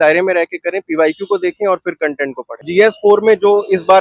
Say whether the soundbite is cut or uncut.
cut